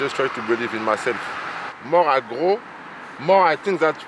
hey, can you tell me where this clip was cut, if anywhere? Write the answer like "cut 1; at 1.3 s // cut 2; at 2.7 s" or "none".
cut 1; at 1.7 s